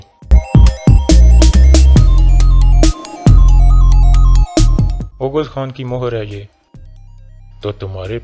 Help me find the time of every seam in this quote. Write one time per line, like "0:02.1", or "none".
none